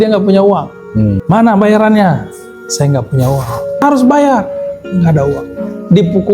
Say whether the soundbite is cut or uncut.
cut